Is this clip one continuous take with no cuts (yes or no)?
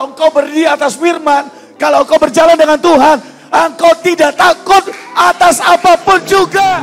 yes